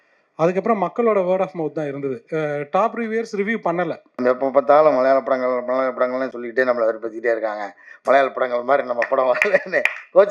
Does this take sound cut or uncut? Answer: cut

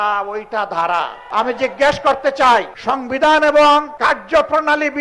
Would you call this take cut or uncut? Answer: cut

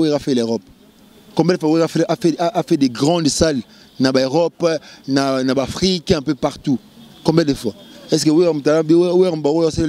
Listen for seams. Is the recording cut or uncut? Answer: uncut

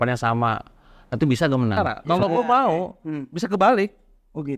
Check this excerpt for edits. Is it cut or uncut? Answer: cut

